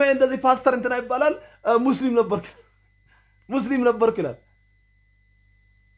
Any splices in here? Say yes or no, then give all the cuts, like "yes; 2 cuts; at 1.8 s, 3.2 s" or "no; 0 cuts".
no; 0 cuts